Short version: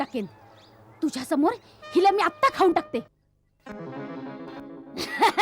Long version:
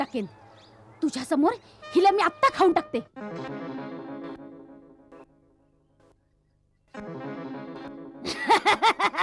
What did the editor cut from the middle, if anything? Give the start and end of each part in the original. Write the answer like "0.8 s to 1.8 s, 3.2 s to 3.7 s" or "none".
3.1 s to 6.4 s